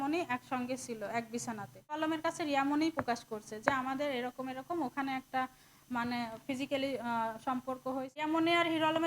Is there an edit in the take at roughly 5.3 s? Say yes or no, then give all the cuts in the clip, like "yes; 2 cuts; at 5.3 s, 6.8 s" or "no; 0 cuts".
no; 2 cuts; at 2.0 s, 8.2 s